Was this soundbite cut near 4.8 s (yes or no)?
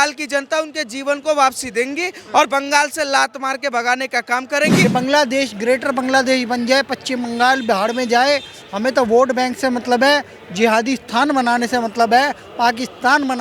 yes